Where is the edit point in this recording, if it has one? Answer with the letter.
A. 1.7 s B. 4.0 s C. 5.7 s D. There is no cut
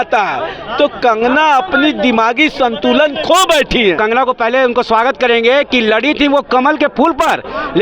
B